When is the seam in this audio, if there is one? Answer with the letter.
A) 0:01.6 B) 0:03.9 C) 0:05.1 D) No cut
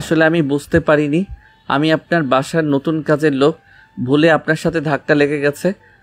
D